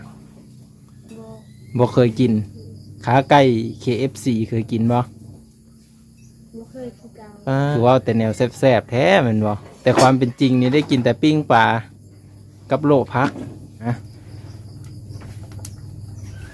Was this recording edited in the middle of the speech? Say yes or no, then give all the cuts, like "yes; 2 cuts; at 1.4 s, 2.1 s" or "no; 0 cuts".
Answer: yes; 3 cuts; at 7.7 s, 9.7 s, 13.9 s